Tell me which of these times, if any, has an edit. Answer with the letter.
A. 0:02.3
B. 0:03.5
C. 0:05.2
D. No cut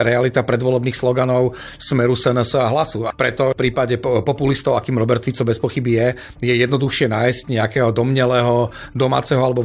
B